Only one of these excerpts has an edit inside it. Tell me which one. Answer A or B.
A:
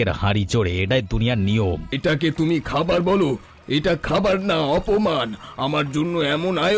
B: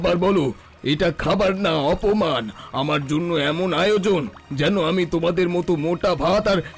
A